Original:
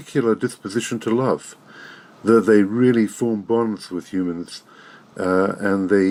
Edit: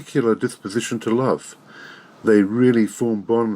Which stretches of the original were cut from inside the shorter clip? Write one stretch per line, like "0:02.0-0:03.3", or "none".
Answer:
0:02.2-0:02.4